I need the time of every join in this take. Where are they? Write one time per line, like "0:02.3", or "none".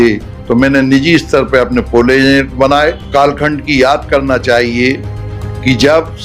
0:03.1